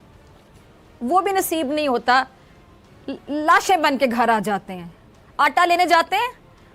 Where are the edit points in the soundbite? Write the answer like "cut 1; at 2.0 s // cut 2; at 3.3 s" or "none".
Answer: none